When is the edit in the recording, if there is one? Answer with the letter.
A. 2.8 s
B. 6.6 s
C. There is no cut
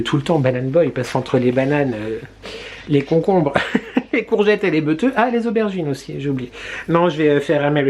C